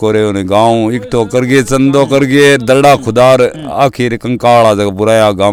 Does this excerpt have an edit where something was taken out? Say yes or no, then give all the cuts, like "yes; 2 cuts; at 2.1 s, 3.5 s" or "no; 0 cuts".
no; 0 cuts